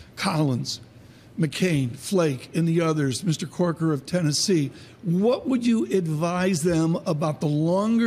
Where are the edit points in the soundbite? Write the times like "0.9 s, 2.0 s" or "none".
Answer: 7.1 s